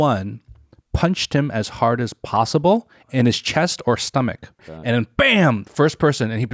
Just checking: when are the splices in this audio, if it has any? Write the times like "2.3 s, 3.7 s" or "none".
4.7 s

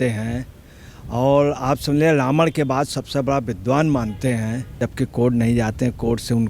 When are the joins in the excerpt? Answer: 4.9 s

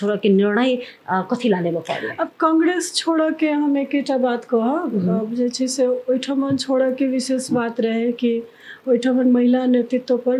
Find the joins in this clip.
none

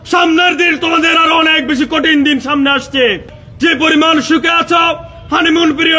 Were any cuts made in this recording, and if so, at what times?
3.3 s

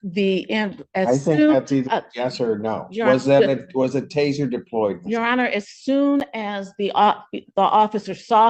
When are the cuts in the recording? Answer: none

